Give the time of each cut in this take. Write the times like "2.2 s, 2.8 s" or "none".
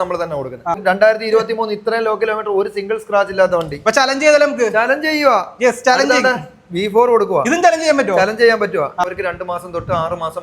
0.8 s, 9.0 s